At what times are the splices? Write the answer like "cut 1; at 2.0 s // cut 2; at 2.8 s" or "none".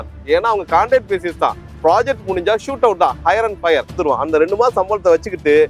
cut 1; at 3.9 s

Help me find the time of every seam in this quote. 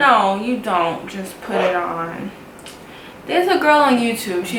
none

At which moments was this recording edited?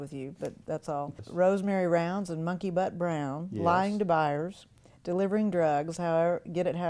cut 1; at 1.2 s

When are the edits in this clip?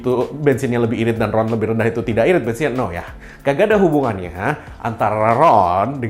none

